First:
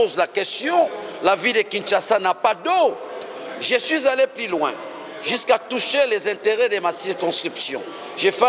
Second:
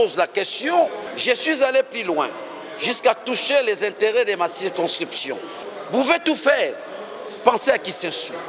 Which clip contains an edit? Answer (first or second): second